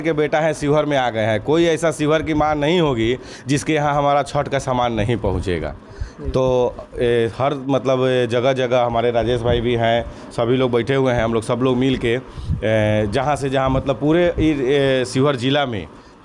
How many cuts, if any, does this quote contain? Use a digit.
0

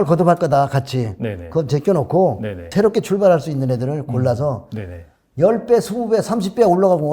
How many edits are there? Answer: 1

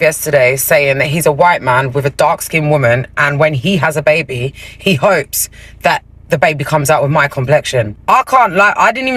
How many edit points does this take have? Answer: 0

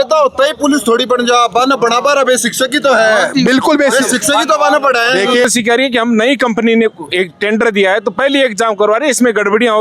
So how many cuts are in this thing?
1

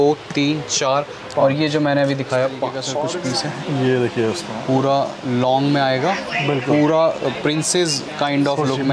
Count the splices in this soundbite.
1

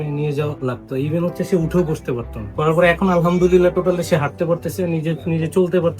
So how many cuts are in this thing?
1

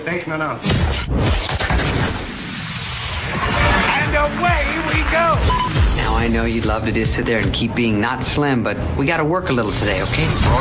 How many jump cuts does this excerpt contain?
0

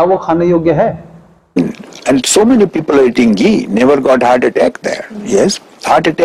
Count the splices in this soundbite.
1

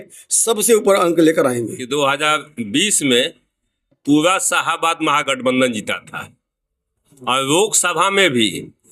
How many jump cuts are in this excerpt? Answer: 1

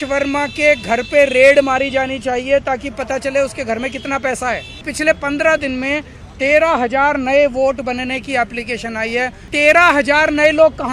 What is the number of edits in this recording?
2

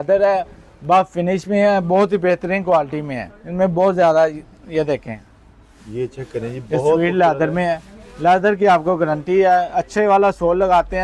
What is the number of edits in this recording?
0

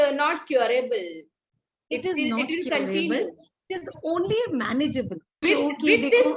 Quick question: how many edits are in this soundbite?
1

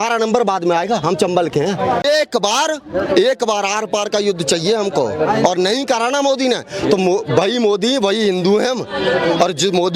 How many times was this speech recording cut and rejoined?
1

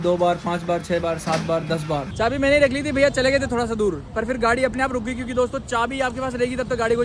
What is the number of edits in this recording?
1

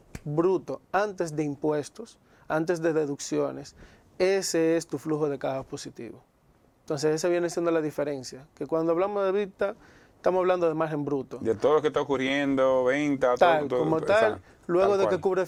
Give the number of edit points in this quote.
0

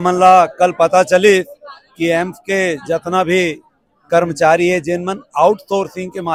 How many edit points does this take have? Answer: 0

